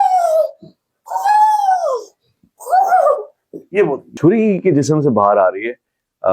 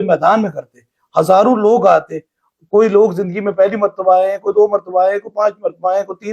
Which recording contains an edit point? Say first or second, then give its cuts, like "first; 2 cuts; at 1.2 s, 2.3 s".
first; 1 cut; at 4.1 s